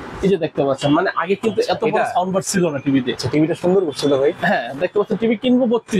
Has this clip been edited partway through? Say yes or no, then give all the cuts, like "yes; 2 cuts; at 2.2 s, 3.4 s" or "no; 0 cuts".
no; 0 cuts